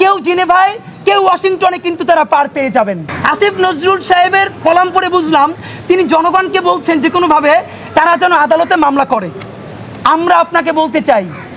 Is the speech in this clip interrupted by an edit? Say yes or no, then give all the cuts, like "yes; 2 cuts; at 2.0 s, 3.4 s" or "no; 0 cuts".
yes; 1 cut; at 3.1 s